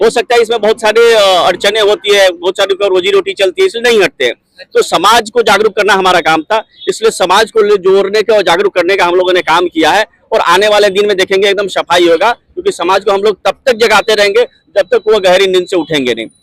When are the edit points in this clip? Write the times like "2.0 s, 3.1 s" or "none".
none